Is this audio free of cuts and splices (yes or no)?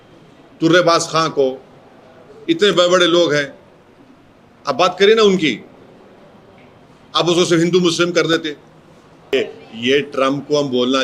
no